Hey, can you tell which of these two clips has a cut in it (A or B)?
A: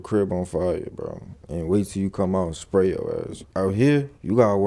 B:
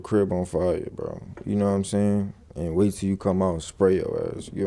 A